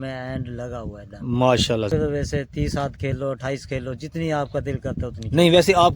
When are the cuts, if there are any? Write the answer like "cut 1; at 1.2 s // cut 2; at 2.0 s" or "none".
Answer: cut 1; at 1.9 s